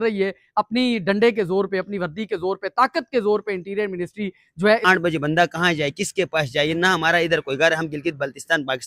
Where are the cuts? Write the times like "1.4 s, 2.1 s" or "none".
4.8 s